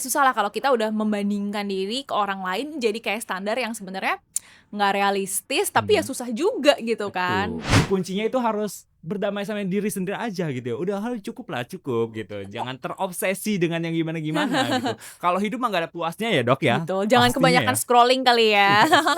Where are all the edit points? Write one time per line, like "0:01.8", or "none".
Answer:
0:07.7

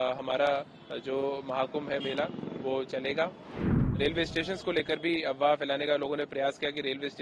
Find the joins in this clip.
0:04.0

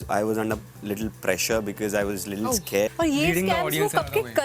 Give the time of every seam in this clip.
0:02.9

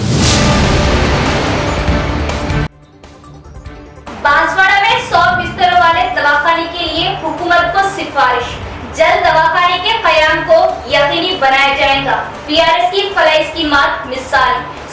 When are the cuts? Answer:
none

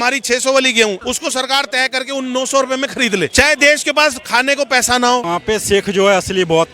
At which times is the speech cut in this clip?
0:01.0
0:03.3
0:05.2

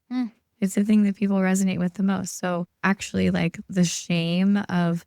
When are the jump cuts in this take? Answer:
0:02.7

